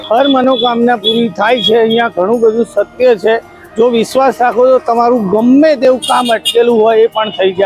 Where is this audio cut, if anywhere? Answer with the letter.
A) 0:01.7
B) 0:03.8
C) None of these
C